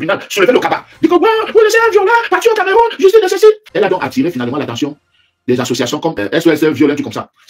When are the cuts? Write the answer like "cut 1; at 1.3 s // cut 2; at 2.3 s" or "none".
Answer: cut 1; at 3.6 s // cut 2; at 6.2 s